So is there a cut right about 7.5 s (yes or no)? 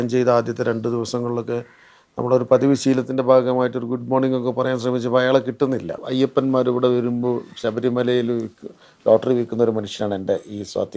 no